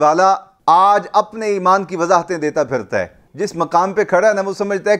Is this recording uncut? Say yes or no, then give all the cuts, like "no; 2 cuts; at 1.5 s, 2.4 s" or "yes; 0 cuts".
no; 1 cut; at 3.2 s